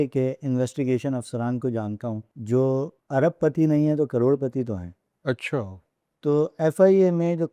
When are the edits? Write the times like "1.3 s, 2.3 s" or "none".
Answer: 2.3 s, 3.0 s